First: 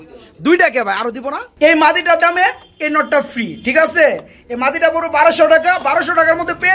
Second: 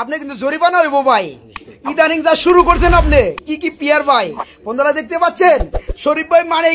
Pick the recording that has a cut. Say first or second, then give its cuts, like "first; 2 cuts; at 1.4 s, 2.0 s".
first; 1 cut; at 1.5 s